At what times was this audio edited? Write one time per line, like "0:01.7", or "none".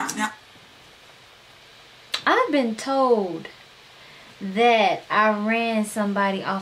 0:01.6